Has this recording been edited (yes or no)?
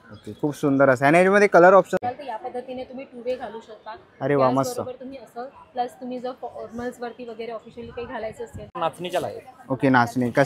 yes